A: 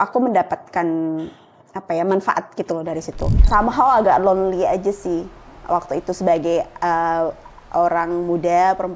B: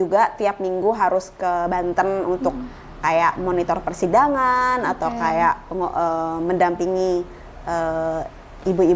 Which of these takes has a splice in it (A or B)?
A